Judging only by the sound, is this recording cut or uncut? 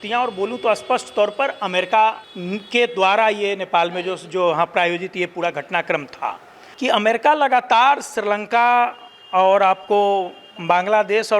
cut